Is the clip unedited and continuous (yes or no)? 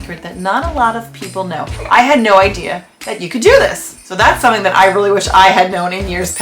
no